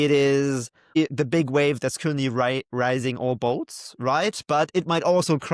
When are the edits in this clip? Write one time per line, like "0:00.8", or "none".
0:01.0

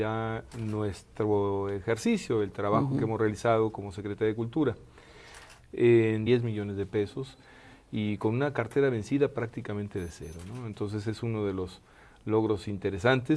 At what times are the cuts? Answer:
none

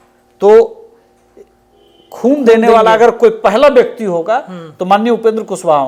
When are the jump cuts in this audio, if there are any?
none

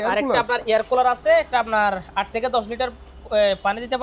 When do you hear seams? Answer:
none

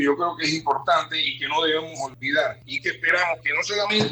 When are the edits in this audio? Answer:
0:02.5

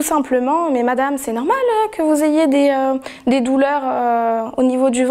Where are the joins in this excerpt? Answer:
none

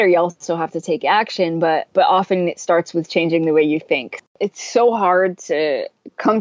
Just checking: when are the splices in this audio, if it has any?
0:01.9
0:04.2

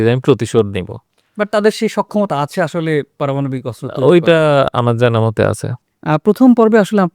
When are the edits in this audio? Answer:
none

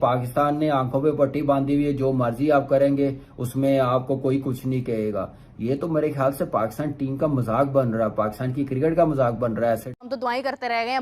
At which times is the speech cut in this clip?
0:10.1

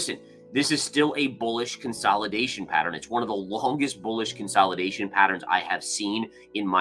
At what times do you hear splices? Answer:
none

